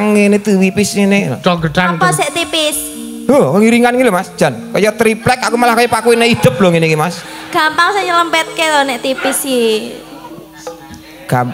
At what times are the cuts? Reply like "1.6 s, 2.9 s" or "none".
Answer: none